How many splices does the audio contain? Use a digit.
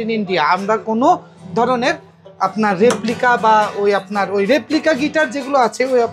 0